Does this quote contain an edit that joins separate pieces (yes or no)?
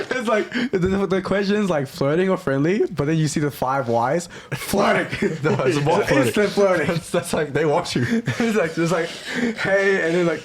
no